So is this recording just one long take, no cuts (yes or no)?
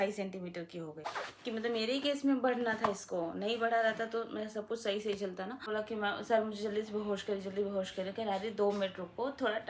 no